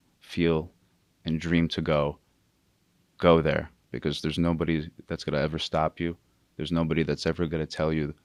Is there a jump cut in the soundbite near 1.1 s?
no; 0 cuts

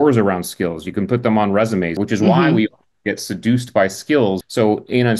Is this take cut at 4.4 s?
yes; 2 cuts; at 2.0 s, 4.4 s

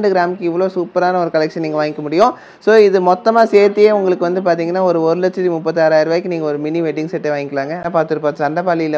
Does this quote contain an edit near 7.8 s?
yes; 1 cut; at 7.8 s

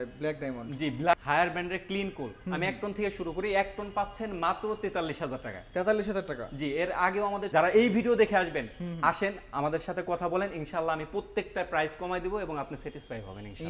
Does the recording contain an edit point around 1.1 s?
yes; 2 cuts; at 1.1 s, 7.5 s

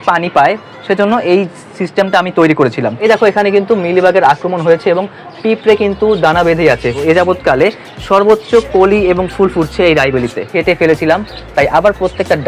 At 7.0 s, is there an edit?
yes; 3 cuts; at 2.9 s, 7.0 s, 10.4 s

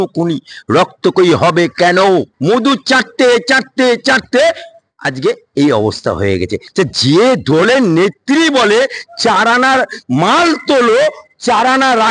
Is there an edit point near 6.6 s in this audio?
yes; 2 cuts; at 2.3 s, 6.6 s

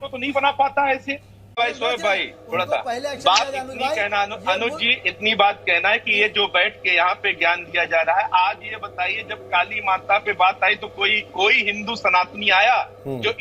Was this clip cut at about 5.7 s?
no; 1 cut; at 1.6 s

